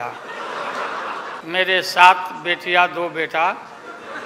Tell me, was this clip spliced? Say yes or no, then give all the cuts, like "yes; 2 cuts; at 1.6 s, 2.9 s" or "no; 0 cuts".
yes; 1 cut; at 1.4 s